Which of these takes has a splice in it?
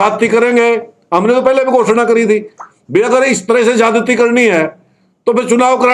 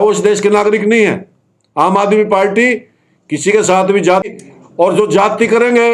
second; 1 cut; at 4.2 s

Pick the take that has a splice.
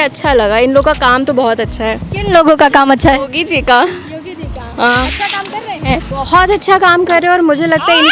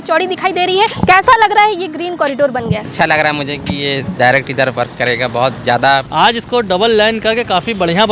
second; 3 cuts; at 1.0 s, 2.9 s, 6.1 s

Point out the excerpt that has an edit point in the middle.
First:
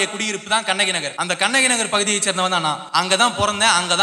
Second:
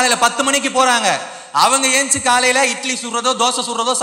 first; 2 cuts; at 1.1 s, 2.8 s

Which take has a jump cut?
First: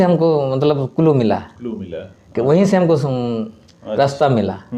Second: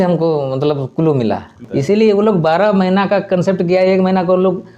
second; 1 cut; at 1.6 s

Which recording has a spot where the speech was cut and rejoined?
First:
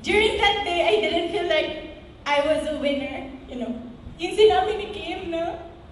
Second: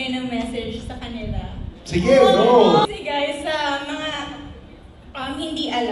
second; 1 cut; at 2.8 s

